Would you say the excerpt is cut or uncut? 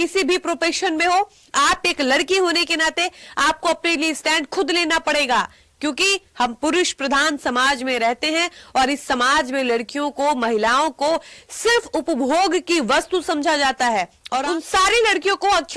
cut